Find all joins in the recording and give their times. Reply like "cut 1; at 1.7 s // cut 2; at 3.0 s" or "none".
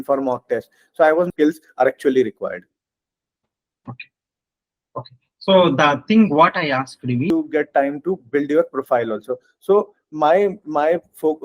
cut 1; at 1.3 s // cut 2; at 7.3 s